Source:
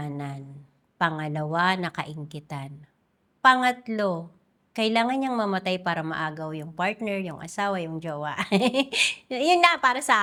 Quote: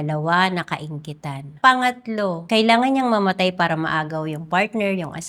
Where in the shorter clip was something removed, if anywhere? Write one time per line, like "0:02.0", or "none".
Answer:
0:01.5
0:02.4

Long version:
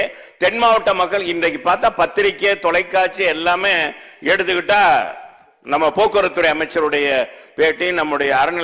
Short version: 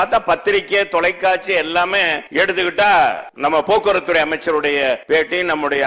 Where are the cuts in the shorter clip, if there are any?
0:02.2
0:03.3
0:05.0

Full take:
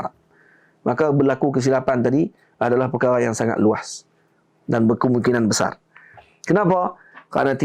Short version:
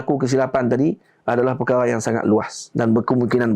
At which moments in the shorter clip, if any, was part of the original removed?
0:02.6

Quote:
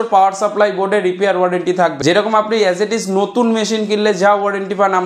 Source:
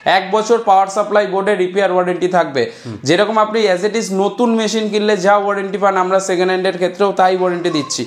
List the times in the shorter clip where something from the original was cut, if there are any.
0:02.0

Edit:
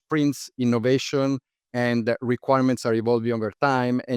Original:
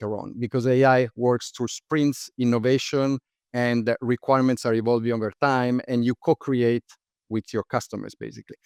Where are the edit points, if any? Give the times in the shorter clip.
none

